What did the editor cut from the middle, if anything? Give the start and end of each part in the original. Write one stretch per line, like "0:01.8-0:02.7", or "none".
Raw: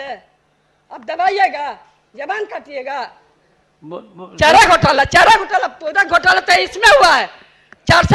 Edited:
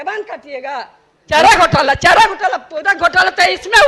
0:03.3-0:04.2